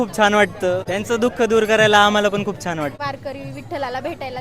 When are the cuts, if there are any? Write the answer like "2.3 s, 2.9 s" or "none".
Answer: 0.9 s, 3.0 s